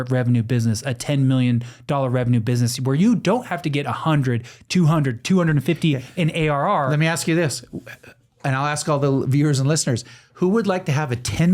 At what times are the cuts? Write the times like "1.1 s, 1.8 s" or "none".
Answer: none